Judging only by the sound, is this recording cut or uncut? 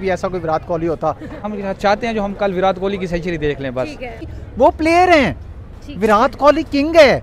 cut